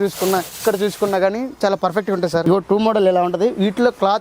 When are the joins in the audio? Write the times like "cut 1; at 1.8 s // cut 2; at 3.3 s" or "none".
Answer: cut 1; at 2.4 s

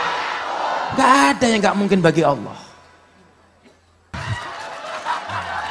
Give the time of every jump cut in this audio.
cut 1; at 4.1 s

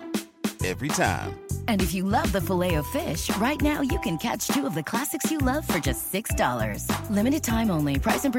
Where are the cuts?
none

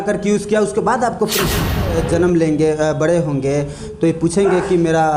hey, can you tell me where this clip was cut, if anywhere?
cut 1; at 1.7 s

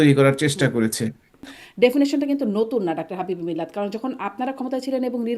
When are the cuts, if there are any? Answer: cut 1; at 1.6 s

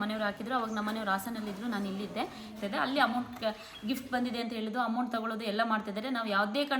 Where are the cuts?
cut 1; at 2.5 s

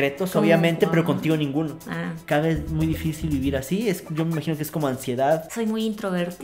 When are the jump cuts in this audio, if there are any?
cut 1; at 2.2 s // cut 2; at 5.5 s

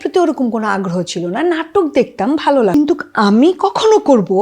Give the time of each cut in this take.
cut 1; at 2.7 s

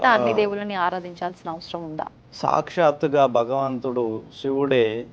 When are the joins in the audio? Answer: cut 1; at 2.2 s

